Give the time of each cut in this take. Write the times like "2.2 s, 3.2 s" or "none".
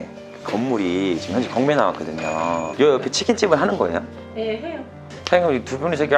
2.7 s, 5.1 s